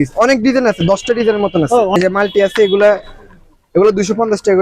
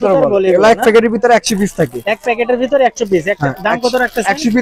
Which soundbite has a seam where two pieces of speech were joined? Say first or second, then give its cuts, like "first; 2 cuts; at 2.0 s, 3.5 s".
first; 1 cut; at 1.9 s